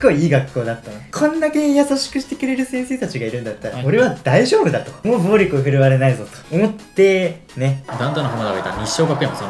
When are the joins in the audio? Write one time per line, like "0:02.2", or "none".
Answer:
0:04.9
0:07.9